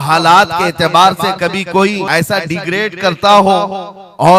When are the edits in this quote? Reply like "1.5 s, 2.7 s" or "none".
2.0 s